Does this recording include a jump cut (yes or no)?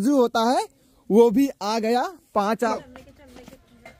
yes